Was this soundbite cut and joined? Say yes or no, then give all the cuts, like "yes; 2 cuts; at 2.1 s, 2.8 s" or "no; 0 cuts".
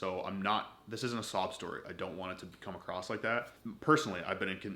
yes; 1 cut; at 3.5 s